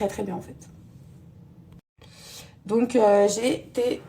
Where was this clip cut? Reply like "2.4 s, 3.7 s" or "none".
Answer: 2.1 s